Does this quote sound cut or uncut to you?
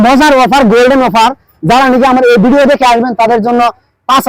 uncut